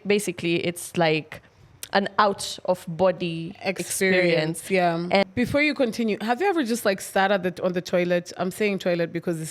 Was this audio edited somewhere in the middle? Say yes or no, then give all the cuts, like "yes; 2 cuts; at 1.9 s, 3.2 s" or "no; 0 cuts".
yes; 1 cut; at 5.2 s